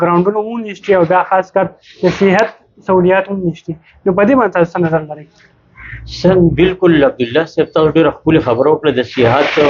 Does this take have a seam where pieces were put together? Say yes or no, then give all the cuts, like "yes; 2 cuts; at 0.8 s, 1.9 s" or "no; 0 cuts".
no; 0 cuts